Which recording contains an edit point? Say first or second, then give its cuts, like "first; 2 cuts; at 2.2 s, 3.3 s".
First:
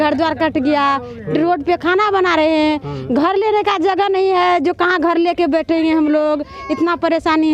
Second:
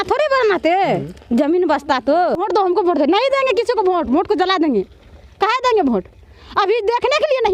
second; 1 cut; at 2.4 s